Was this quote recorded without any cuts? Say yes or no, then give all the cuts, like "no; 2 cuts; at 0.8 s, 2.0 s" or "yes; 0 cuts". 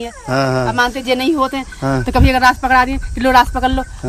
yes; 0 cuts